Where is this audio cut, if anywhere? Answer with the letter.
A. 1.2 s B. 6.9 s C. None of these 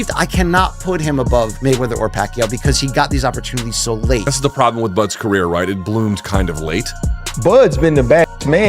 B